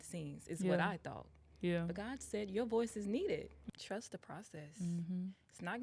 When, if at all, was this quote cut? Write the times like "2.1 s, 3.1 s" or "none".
3.5 s